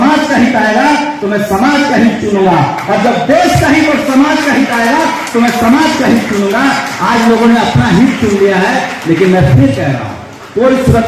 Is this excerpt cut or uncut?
uncut